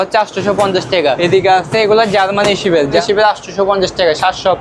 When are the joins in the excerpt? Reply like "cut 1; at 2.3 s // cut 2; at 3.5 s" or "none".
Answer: cut 1; at 1.2 s // cut 2; at 3.0 s